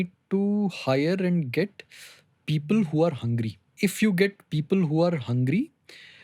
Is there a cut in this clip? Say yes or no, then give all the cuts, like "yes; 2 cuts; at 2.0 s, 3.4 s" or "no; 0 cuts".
yes; 1 cut; at 3.7 s